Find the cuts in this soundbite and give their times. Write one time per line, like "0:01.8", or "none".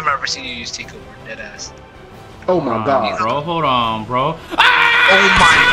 none